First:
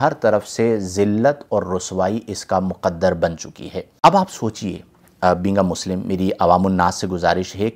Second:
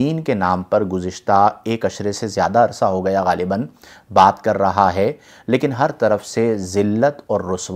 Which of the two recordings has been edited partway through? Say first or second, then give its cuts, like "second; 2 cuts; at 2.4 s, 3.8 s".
first; 1 cut; at 3.9 s